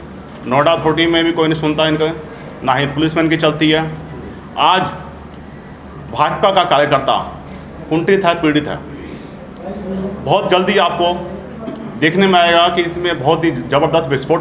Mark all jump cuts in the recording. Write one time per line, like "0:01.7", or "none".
none